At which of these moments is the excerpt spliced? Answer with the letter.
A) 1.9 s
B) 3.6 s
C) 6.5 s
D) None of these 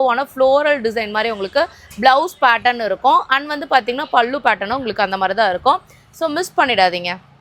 D